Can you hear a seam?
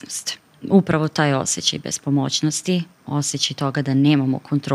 no; 0 cuts

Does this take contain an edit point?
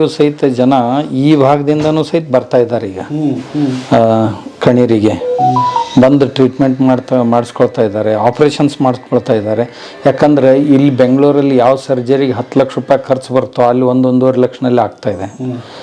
no; 0 cuts

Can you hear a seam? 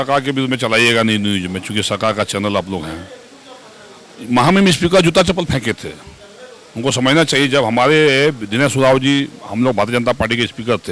no; 0 cuts

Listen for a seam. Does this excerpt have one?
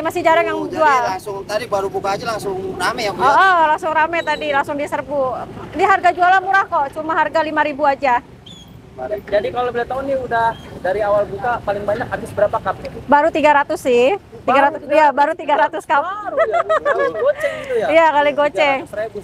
no; 0 cuts

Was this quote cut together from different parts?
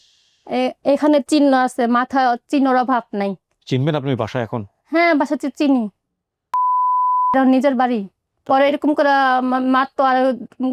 no; 0 cuts

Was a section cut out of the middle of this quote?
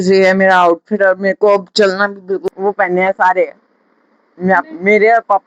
yes; 1 cut; at 2.4 s

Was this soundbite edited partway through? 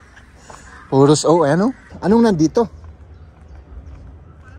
yes; 1 cut; at 1.9 s

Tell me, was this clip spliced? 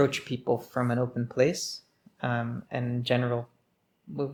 no; 0 cuts

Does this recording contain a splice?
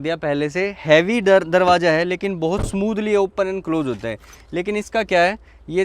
no; 0 cuts

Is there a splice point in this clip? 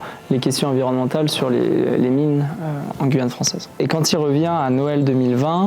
yes; 1 cut; at 3.8 s

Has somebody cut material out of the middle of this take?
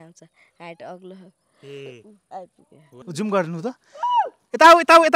yes; 1 cut; at 3.0 s

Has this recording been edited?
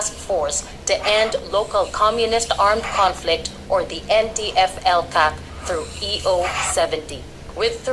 no; 0 cuts

